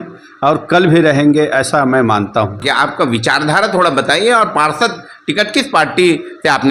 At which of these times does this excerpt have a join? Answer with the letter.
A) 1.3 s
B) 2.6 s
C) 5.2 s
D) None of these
B